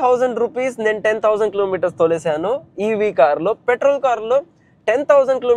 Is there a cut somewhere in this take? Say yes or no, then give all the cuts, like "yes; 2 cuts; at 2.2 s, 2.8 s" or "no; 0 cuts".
no; 0 cuts